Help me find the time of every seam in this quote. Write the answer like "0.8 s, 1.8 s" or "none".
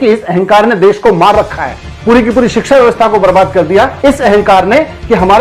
none